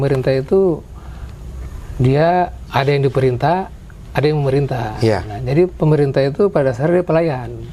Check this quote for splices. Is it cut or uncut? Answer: uncut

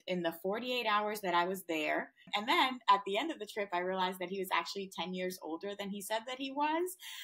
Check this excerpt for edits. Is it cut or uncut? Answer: cut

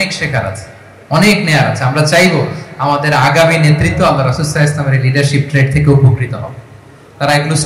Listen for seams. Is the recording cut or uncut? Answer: uncut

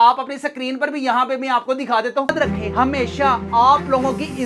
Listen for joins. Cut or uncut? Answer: cut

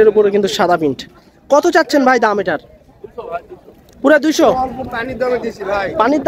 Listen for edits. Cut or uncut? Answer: cut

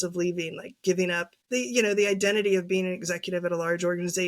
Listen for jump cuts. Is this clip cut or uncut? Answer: cut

